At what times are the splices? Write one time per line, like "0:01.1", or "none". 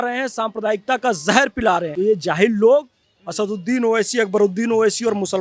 0:01.9